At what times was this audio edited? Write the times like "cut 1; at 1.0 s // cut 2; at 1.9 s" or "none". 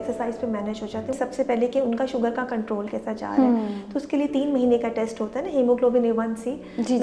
cut 1; at 1.2 s